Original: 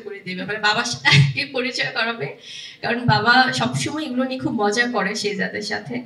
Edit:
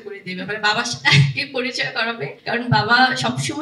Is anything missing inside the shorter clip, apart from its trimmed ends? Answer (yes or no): yes